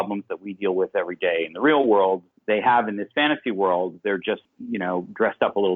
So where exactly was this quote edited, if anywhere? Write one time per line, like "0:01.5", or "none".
0:02.3
0:04.5